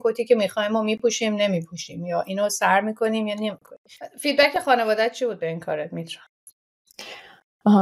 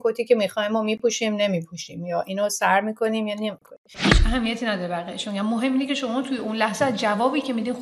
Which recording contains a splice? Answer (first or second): second